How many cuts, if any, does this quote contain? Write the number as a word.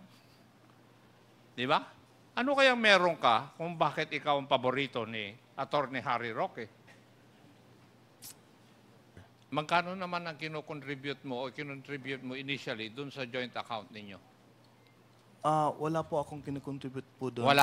one